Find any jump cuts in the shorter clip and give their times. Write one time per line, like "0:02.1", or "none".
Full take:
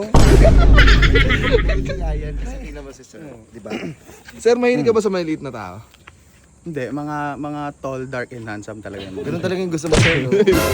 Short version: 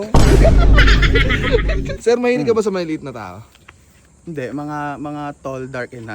0:01.9

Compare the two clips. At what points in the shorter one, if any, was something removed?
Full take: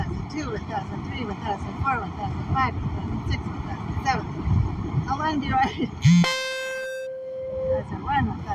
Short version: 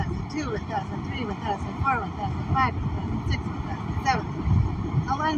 none

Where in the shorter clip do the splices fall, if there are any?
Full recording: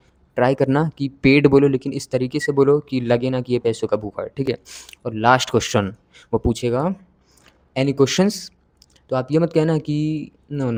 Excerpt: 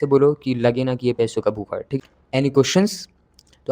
0:01.9

